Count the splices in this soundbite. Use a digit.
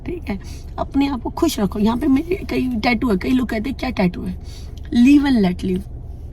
0